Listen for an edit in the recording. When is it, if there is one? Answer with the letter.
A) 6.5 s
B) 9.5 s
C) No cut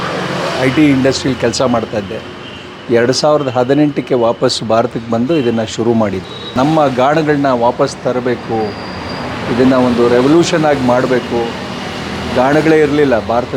A